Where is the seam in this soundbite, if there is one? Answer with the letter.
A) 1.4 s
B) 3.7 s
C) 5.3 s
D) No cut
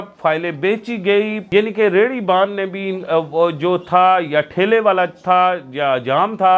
A